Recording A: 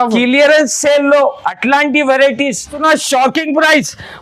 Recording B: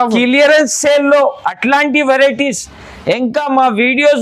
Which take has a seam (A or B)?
A